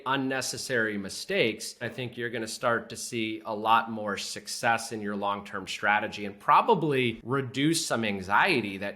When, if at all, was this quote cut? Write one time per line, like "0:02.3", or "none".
0:01.9
0:07.2